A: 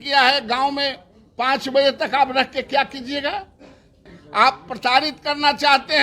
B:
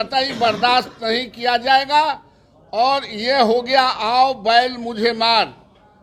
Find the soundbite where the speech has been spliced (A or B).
A